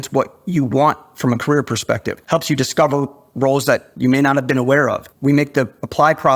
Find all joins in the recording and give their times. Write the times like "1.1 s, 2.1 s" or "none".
2.1 s, 3.9 s, 5.1 s